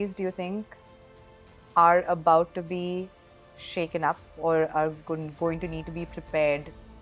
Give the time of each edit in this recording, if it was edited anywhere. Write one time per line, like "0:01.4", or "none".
none

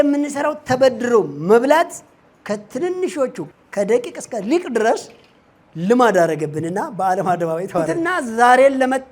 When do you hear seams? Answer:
0:03.4
0:07.9

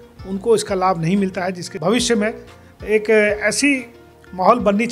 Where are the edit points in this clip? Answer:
0:01.6

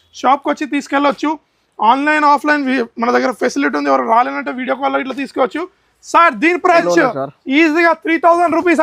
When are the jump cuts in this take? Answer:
0:06.8

